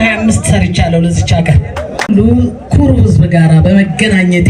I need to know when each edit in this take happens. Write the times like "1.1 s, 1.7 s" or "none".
2.1 s